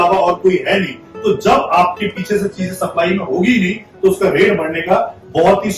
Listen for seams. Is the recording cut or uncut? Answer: uncut